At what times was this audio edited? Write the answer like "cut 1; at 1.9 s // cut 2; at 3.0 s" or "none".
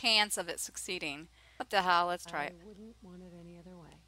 cut 1; at 1.4 s